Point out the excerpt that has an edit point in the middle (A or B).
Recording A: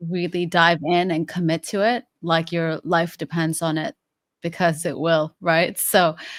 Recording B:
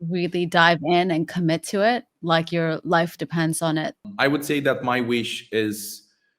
B